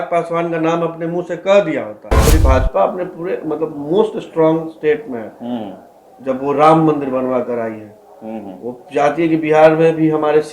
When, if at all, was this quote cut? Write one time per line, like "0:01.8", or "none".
0:02.3